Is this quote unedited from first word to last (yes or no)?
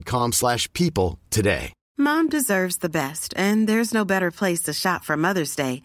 no